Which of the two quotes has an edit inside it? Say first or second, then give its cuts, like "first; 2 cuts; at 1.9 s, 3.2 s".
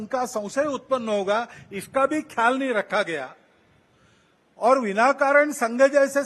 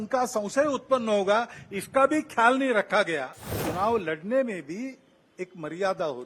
second; 1 cut; at 3.6 s